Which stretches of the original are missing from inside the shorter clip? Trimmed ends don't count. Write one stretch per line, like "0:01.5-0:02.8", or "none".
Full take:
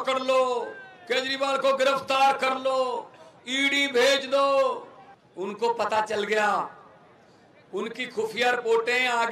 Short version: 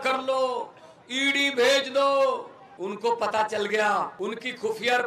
0:05.0-0:05.2
0:06.7-0:07.7